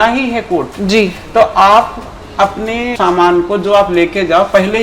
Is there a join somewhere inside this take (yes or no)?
yes